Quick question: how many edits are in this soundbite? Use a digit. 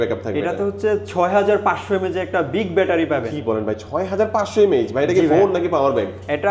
0